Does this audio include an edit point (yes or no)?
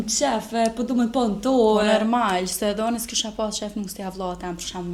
no